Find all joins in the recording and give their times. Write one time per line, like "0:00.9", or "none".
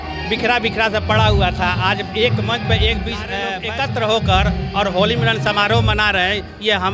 0:03.6